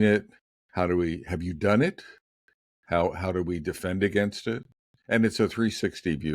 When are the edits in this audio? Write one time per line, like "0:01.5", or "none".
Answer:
none